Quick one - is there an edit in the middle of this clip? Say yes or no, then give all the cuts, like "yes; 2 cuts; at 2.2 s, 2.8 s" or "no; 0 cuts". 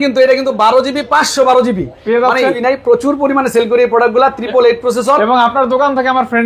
yes; 1 cut; at 2.6 s